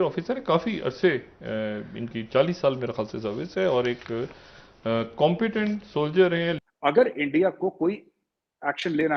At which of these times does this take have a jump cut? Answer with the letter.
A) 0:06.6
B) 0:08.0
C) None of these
A